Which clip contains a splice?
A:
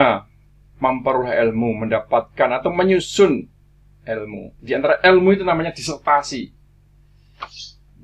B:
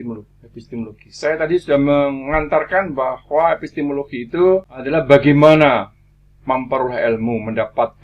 B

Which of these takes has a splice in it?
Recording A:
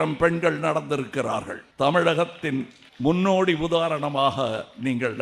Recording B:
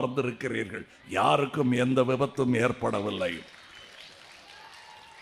A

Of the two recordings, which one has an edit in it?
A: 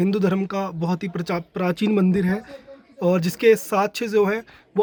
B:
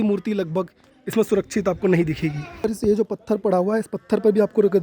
B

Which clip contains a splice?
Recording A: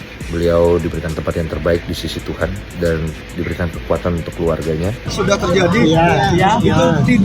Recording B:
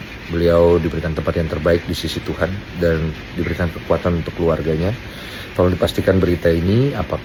A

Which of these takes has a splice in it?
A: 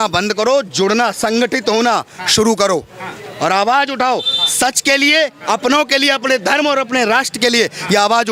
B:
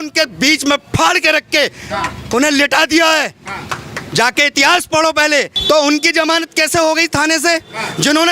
B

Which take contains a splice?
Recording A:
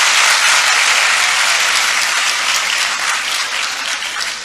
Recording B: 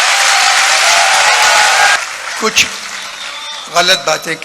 B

